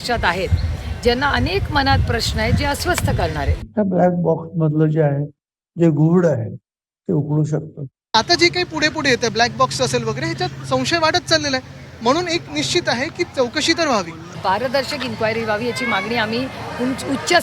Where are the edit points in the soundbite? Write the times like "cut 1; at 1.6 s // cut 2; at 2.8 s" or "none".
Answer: cut 1; at 3.6 s // cut 2; at 8.1 s // cut 3; at 14.3 s